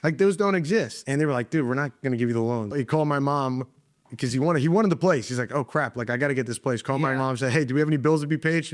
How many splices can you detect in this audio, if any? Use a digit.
2